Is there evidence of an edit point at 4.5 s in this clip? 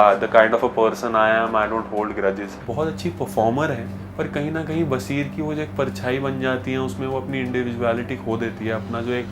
no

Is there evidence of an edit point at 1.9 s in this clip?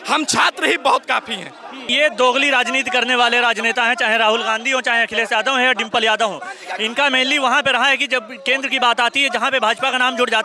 yes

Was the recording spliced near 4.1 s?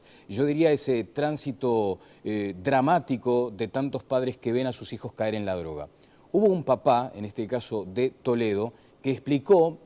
no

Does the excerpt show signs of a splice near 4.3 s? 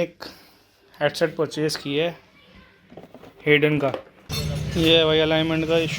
yes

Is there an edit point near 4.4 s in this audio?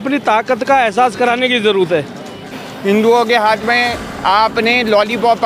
no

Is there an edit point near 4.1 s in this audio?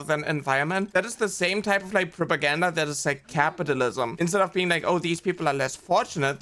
yes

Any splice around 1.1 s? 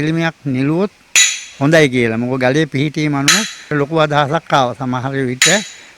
no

